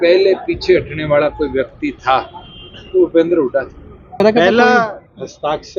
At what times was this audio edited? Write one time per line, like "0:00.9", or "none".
0:04.2